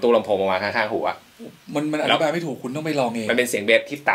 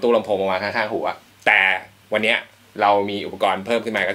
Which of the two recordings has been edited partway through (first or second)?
second